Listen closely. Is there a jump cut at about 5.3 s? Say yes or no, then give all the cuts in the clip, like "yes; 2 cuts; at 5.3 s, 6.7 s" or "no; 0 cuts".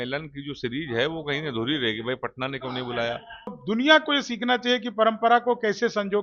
no; 1 cut; at 3.6 s